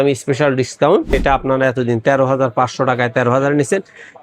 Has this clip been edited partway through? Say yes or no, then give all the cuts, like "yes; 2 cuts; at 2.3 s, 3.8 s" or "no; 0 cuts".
yes; 1 cut; at 1.2 s